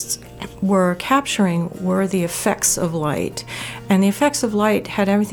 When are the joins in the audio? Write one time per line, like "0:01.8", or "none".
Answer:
none